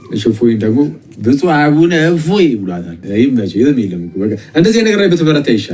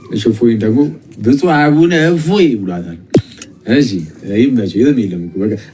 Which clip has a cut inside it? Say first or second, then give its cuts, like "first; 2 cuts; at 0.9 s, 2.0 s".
first; 1 cut; at 2.9 s